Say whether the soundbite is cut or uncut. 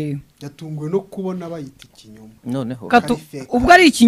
uncut